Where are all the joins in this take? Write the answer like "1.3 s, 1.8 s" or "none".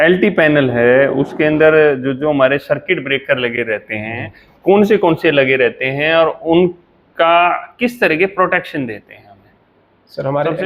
none